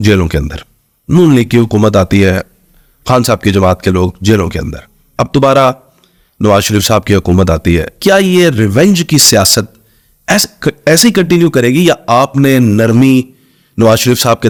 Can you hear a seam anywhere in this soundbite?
no; 0 cuts

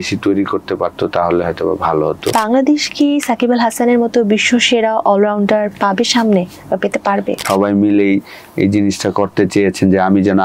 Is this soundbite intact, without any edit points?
no; 2 cuts; at 2.3 s, 7.4 s

